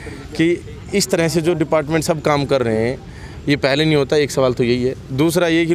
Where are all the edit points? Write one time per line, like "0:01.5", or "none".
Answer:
none